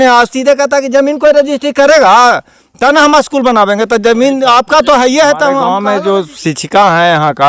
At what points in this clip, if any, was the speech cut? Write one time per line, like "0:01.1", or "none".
0:05.7